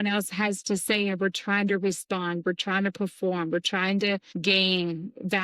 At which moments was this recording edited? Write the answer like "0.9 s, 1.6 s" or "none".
4.3 s